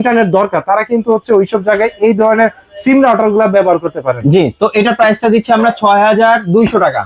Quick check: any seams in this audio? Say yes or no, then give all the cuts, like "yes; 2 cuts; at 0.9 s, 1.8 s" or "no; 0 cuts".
no; 0 cuts